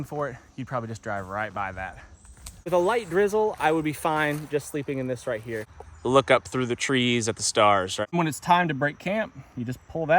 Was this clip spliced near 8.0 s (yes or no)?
yes